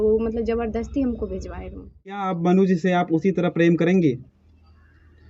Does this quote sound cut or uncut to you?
cut